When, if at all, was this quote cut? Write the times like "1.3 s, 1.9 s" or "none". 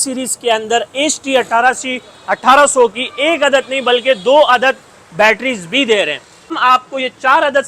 6.5 s